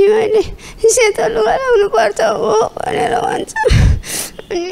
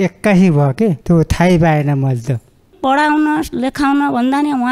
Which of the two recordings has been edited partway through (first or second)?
second